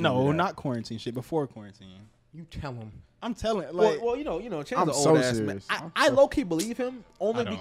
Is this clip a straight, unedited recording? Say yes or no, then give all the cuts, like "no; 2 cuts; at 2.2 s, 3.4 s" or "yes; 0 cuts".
yes; 0 cuts